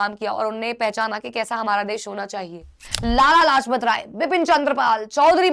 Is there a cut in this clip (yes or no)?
yes